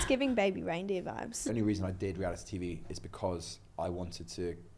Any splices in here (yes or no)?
yes